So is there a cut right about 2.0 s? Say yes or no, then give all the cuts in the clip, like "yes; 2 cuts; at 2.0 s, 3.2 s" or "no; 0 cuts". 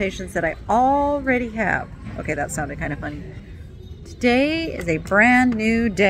no; 1 cut; at 3.5 s